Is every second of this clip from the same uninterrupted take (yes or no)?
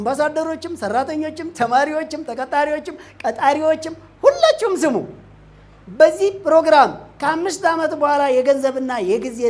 yes